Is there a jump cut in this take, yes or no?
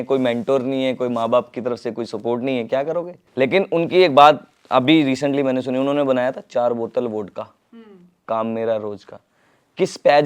yes